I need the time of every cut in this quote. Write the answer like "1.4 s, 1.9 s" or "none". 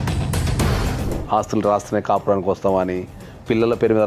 1.0 s